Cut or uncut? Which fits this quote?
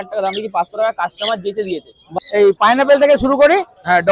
cut